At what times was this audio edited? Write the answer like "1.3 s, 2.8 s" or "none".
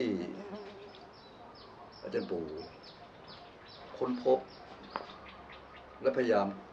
none

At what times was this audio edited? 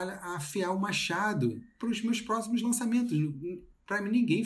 1.7 s

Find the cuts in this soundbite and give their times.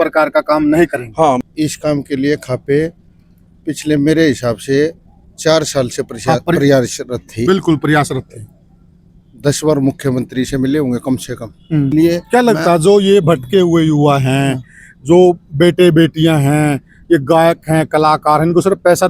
1.4 s, 11.9 s

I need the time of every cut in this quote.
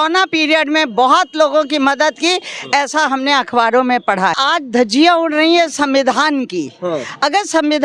4.4 s

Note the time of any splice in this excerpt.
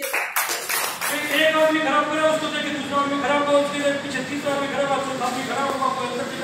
1.0 s

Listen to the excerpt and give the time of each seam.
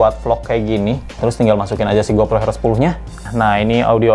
1.2 s, 3.2 s

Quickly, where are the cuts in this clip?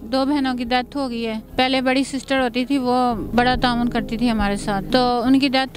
1.4 s, 3.3 s, 4.8 s

